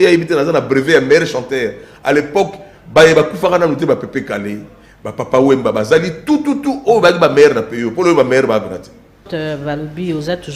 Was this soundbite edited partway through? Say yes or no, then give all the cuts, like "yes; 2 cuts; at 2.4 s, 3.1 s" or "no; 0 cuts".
yes; 1 cut; at 9.3 s